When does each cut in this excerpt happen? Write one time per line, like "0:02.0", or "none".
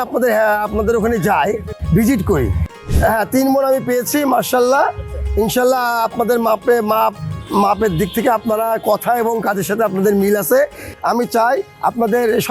0:01.7
0:02.7
0:10.9